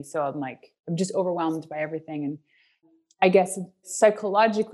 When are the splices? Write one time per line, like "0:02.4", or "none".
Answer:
0:02.8
0:03.9